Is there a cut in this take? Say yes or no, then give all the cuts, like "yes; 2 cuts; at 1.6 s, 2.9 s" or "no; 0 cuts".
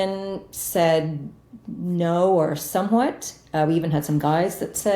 no; 0 cuts